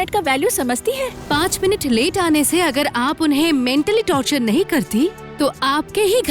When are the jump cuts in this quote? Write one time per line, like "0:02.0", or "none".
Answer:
0:01.2